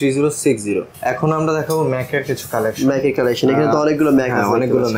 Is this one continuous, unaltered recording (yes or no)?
no